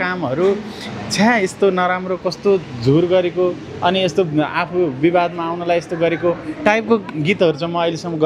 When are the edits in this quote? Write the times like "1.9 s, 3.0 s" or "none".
none